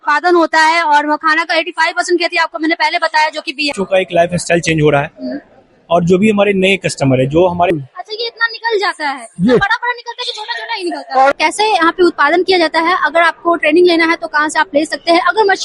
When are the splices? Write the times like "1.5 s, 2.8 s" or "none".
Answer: 3.7 s, 7.7 s, 11.3 s

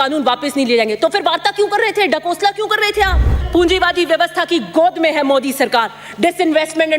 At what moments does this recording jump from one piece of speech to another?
3.4 s

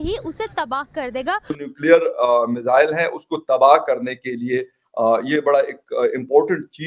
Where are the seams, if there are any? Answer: 1.6 s

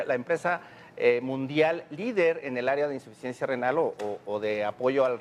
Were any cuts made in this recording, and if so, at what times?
1.4 s

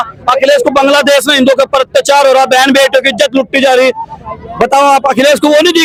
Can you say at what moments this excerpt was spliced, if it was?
none

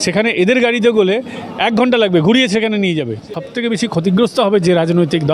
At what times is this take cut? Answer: 3.4 s

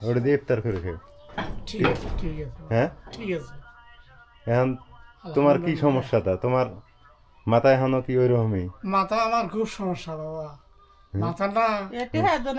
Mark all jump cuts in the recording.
none

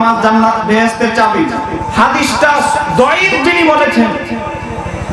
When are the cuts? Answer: 1.8 s

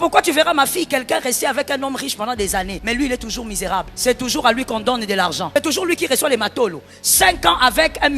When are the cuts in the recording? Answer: 2.8 s, 3.9 s, 5.5 s

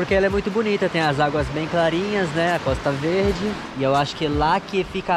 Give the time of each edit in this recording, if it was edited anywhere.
3.6 s

